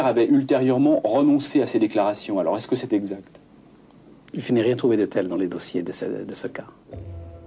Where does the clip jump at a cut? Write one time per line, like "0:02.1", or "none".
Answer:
none